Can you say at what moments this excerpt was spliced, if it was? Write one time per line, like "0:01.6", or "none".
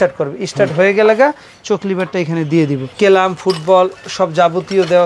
0:02.9